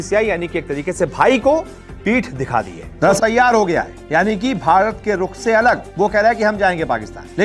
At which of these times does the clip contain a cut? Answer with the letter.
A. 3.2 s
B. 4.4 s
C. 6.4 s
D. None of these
A